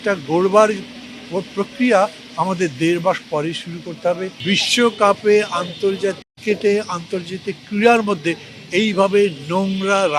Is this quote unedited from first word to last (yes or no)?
no